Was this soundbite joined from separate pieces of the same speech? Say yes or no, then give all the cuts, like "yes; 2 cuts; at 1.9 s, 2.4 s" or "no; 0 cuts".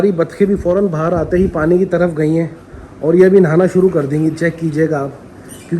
no; 0 cuts